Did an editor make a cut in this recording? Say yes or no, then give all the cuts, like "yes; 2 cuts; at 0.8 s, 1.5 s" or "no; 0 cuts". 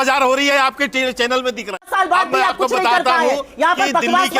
yes; 1 cut; at 1.8 s